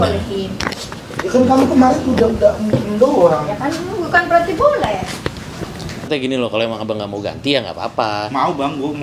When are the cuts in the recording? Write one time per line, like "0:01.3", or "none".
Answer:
0:06.1